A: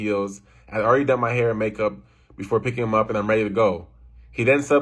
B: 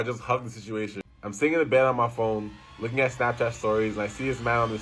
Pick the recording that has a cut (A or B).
B